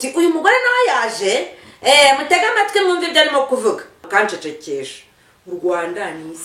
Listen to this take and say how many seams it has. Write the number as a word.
one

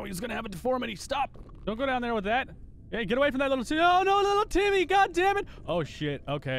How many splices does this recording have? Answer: one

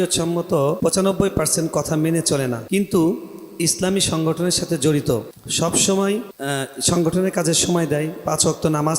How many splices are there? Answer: four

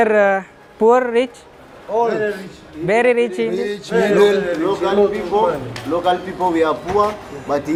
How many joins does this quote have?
zero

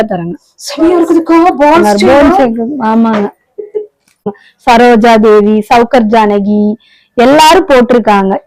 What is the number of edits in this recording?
one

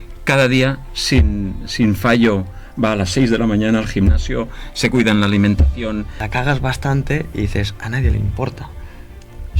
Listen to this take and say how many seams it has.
one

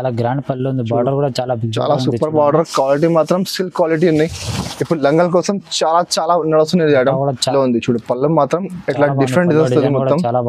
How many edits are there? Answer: one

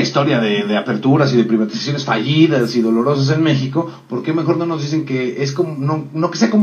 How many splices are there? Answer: one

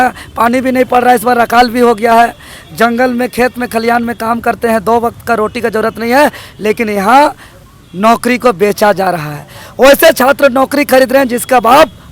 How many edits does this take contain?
zero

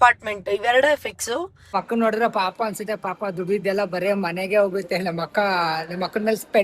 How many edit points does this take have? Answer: one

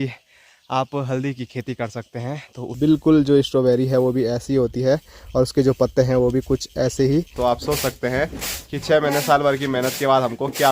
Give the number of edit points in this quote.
two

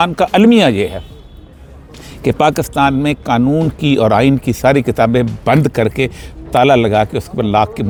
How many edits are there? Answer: zero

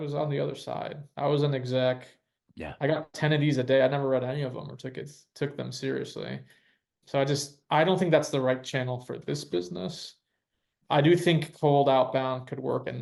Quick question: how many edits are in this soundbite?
zero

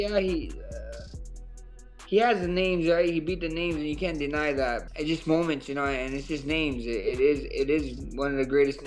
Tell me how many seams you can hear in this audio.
one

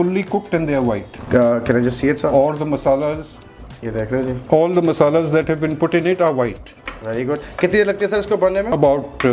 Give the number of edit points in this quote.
zero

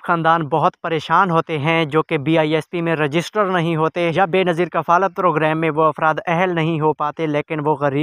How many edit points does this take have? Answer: one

